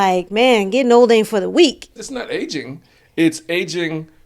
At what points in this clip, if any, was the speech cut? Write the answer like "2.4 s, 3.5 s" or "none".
2.0 s